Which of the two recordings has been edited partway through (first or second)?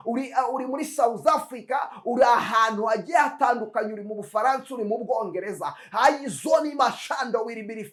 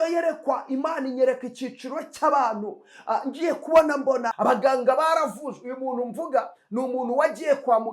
second